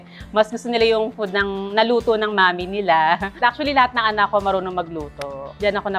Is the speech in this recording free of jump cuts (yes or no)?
no